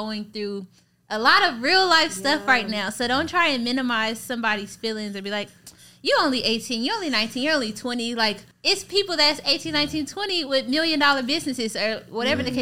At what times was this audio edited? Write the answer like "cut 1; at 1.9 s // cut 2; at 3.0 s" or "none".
cut 1; at 8.5 s